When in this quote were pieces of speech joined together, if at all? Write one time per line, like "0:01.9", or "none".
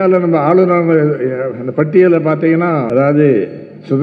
0:02.9